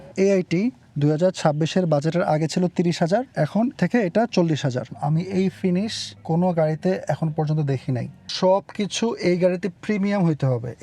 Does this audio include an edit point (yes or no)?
yes